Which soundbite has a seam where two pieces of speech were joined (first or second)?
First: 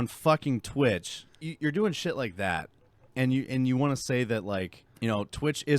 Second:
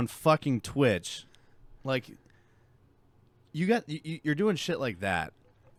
first